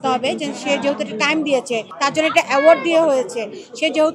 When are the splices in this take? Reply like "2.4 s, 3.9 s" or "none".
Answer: 1.9 s